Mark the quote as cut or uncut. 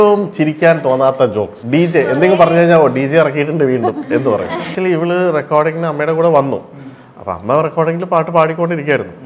cut